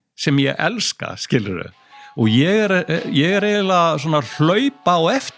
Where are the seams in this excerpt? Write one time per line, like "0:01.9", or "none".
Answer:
none